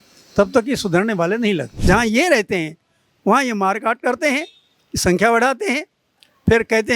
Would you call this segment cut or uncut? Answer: cut